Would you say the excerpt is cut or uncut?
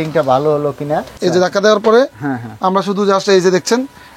cut